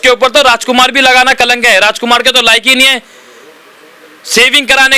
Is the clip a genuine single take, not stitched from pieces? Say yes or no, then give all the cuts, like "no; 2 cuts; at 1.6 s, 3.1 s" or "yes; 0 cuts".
yes; 0 cuts